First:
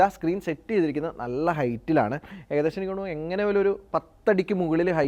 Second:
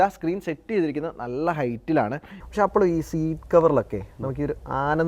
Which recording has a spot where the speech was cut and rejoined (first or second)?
second